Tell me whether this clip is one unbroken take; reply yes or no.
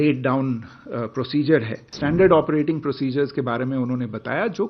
no